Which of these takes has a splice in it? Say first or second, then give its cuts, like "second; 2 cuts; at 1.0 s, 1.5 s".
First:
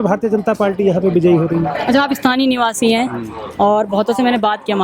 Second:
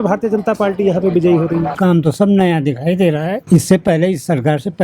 second; 2 cuts; at 1.7 s, 3.4 s